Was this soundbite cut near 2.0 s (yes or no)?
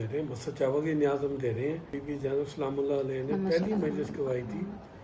yes